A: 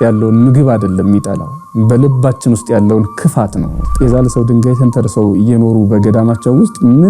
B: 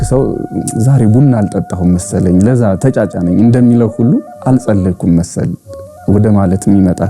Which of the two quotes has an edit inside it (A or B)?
A